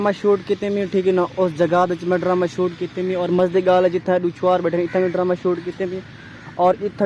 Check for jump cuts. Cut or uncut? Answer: uncut